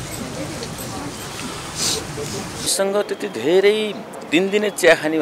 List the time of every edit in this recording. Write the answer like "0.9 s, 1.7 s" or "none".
2.7 s